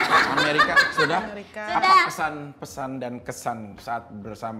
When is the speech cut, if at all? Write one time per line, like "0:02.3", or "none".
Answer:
none